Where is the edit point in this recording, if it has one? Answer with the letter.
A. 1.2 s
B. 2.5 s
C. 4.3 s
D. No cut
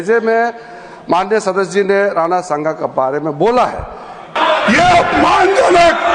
C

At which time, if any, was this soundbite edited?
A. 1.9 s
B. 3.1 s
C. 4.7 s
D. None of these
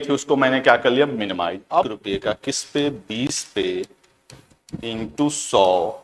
A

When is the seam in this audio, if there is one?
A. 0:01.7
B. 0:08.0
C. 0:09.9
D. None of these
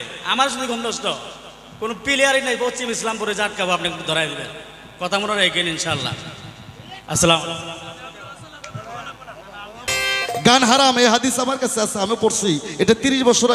C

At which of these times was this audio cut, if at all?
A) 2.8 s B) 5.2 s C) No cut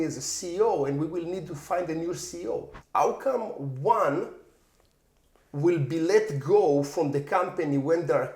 A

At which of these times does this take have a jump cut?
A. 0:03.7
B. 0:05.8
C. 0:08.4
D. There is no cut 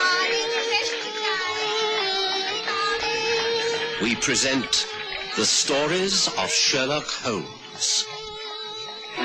A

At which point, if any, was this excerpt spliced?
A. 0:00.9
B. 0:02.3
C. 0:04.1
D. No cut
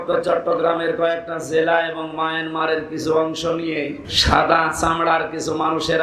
C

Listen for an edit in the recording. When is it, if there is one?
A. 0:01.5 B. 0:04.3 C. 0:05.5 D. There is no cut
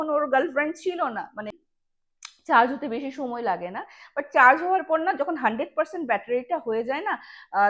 A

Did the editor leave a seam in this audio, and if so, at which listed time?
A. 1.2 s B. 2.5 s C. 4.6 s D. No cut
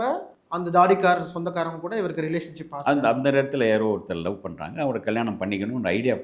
D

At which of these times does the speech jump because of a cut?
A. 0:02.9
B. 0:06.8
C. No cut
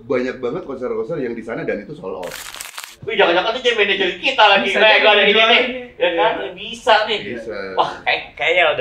A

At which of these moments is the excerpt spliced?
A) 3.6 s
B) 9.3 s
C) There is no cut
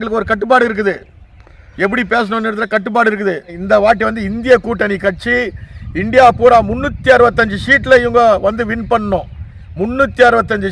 A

